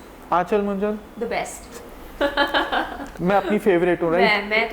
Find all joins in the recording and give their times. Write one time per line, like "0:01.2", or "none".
0:03.0